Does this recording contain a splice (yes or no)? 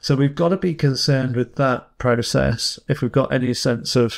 no